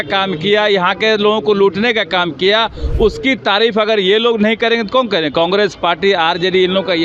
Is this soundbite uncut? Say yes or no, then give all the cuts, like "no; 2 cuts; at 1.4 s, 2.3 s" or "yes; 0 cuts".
yes; 0 cuts